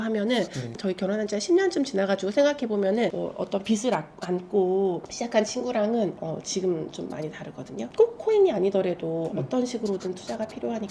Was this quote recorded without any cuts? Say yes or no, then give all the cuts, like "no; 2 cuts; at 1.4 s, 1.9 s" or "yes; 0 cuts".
no; 3 cuts; at 0.8 s, 3.1 s, 7.9 s